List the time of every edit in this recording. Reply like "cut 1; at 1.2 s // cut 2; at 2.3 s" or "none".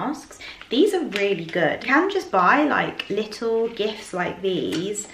cut 1; at 1.8 s